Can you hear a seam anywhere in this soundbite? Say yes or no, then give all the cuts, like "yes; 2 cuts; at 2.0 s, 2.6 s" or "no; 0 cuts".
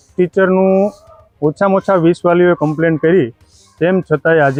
no; 0 cuts